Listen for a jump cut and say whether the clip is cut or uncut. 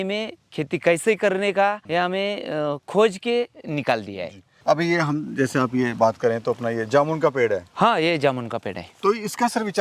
uncut